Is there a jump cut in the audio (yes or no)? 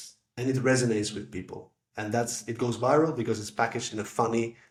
no